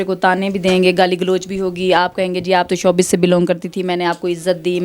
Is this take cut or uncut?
uncut